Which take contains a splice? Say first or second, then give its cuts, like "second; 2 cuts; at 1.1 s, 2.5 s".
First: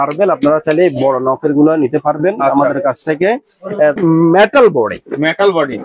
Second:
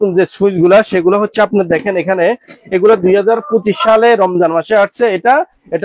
first; 1 cut; at 4.0 s